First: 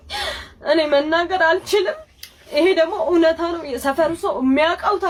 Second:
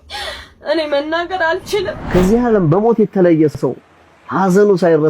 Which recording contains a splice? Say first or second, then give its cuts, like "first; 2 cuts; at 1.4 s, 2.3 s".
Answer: second; 1 cut; at 2.0 s